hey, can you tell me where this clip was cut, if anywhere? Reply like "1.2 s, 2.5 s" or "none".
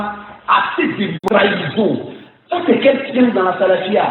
1.2 s